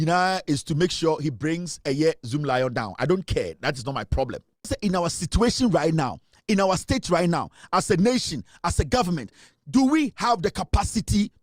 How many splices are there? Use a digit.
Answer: 1